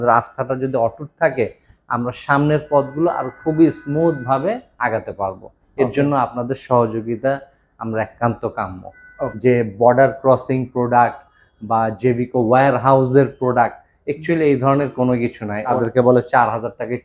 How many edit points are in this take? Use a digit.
2